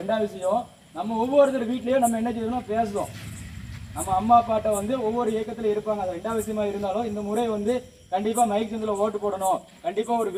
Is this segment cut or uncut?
uncut